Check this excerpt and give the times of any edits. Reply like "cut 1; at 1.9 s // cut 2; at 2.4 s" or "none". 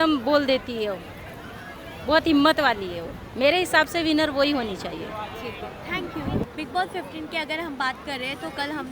none